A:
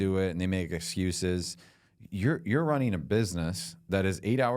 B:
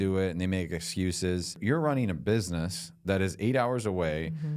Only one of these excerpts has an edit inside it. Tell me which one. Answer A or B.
B